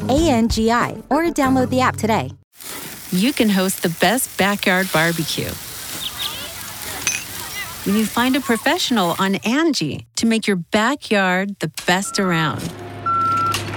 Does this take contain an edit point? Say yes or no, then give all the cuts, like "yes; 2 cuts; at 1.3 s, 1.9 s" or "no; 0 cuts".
yes; 1 cut; at 2.4 s